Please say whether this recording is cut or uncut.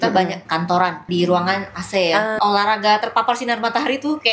cut